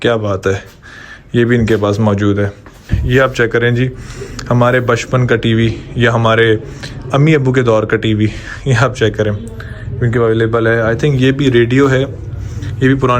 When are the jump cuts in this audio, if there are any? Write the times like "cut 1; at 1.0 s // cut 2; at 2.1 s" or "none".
cut 1; at 2.9 s